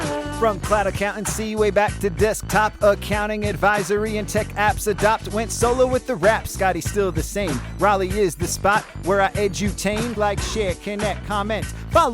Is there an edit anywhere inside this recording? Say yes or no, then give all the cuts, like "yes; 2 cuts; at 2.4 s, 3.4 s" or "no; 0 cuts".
yes; 1 cut; at 10.1 s